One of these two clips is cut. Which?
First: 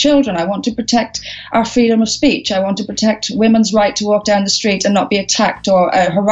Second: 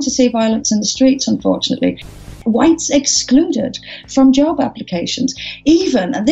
second; 1 cut; at 2.2 s

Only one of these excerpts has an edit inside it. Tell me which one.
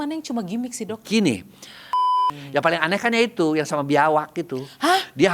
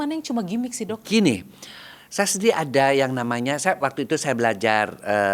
first; 1 cut; at 2.1 s

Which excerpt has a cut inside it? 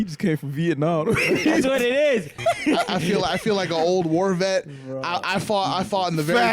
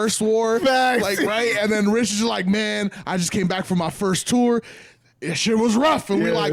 first; 1 cut; at 2.3 s

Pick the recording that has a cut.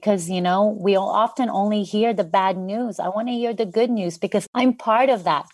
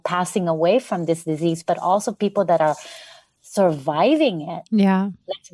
first; 1 cut; at 4.5 s

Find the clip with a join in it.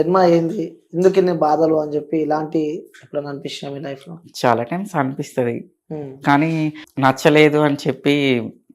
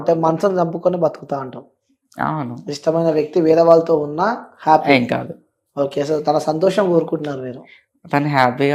first; 1 cut; at 6.8 s

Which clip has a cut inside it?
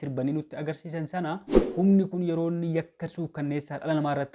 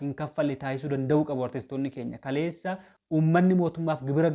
first; 1 cut; at 1.6 s

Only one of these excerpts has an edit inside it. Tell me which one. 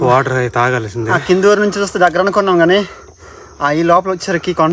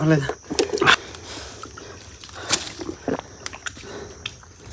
second; 2 cuts; at 1.0 s, 3.0 s

